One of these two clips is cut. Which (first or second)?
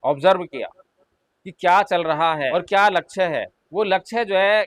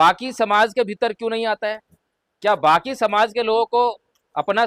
first